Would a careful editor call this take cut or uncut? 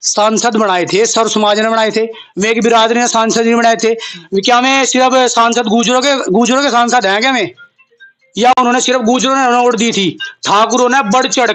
uncut